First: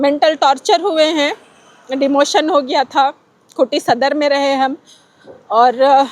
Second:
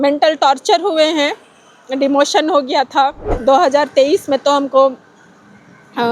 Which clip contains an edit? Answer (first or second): second